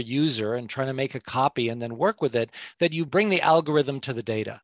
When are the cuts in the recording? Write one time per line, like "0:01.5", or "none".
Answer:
0:03.1